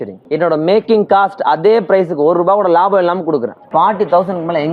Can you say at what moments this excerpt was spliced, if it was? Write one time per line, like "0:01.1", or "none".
0:03.6